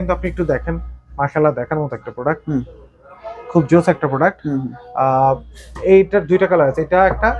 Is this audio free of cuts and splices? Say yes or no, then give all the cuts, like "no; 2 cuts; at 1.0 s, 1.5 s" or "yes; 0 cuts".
yes; 0 cuts